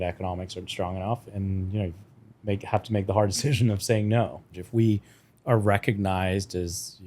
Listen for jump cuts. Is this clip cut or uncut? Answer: cut